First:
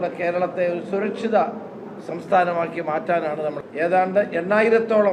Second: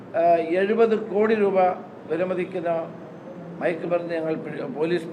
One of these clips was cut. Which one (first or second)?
first